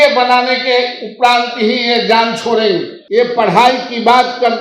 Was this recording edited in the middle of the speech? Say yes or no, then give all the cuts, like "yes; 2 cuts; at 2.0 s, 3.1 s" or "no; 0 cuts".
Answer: yes; 1 cut; at 2.9 s